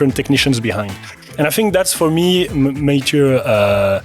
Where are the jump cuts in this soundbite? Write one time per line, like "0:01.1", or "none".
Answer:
0:02.5